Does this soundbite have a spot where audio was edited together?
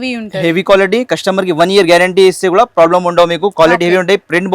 no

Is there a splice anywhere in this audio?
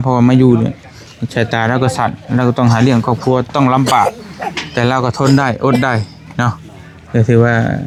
no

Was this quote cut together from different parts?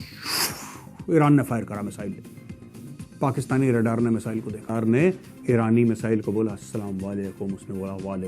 yes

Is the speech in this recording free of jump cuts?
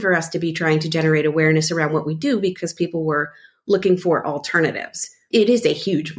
no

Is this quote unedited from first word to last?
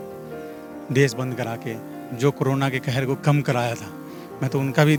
yes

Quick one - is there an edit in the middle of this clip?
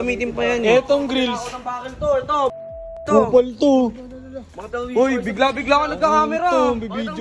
no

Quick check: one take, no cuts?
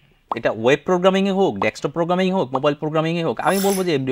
yes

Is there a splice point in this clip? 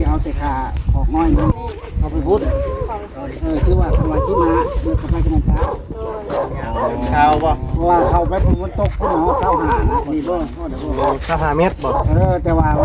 no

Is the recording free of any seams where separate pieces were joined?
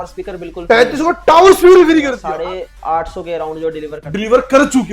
no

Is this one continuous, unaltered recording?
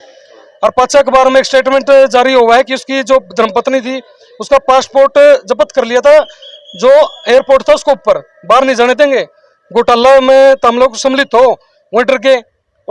yes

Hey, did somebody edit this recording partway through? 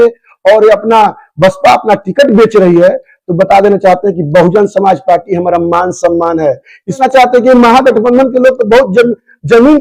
yes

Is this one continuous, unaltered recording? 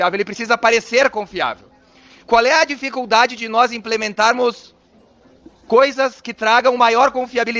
yes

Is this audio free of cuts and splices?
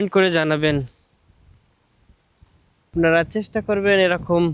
no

